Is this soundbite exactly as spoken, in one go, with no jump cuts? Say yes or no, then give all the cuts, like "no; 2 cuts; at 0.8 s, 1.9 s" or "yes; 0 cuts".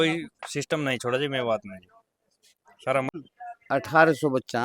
no; 1 cut; at 3.1 s